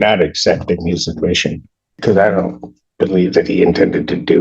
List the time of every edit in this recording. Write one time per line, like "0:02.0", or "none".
0:02.0